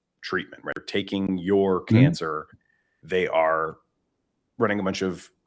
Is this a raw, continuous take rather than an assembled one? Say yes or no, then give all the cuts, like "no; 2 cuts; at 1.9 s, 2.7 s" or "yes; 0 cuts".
no; 1 cut; at 1.0 s